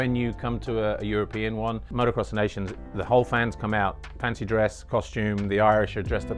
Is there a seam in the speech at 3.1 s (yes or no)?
no